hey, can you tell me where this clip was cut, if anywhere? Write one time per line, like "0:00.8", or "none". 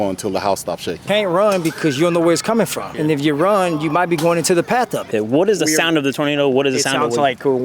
0:01.0
0:02.8
0:05.1